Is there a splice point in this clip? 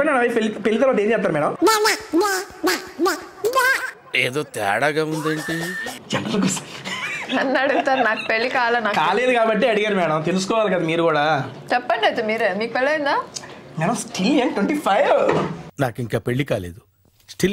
no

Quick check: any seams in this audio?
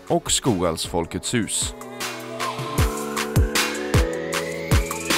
yes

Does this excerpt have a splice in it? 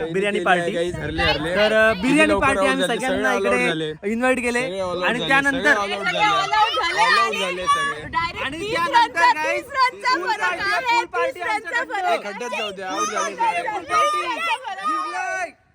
no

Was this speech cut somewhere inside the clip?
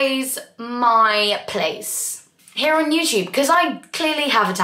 no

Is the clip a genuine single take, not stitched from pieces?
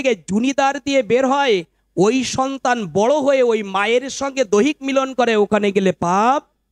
yes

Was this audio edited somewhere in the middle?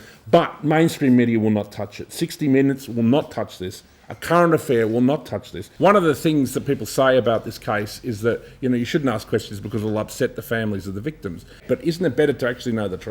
yes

